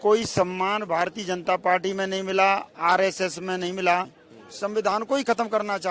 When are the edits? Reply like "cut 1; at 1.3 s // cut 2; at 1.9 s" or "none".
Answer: cut 1; at 4.2 s